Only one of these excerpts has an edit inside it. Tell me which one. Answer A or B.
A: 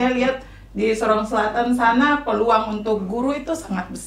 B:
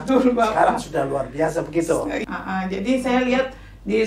B